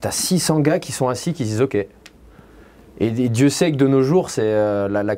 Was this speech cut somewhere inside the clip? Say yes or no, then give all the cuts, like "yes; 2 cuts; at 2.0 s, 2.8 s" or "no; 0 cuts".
no; 0 cuts